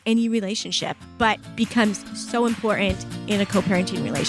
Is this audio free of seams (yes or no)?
no